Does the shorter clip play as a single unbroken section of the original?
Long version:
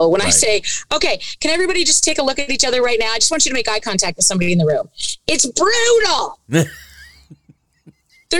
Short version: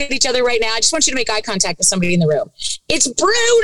yes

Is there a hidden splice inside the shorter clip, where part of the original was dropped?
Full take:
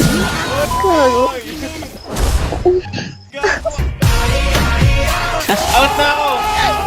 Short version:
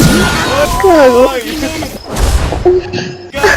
no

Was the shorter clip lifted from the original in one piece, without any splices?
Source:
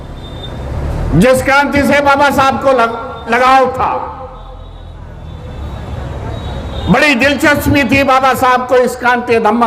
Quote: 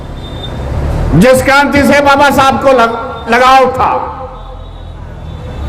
yes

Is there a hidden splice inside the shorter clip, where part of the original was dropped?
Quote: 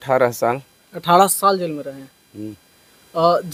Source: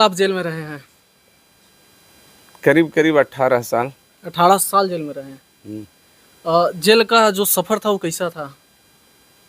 no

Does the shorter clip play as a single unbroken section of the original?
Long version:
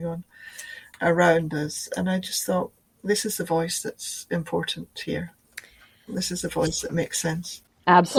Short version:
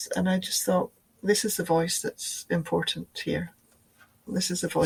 yes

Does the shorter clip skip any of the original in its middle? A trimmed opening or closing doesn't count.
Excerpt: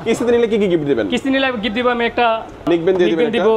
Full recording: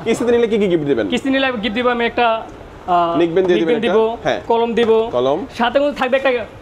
yes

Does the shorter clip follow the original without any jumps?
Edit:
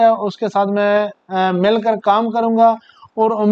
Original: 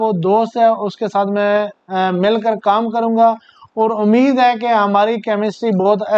yes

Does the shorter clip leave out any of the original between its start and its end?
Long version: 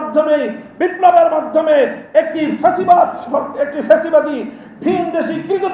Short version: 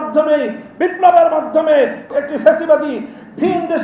yes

